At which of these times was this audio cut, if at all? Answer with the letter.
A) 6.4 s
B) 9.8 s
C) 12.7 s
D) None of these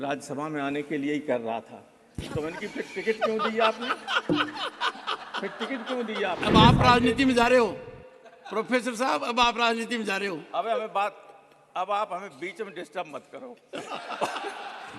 A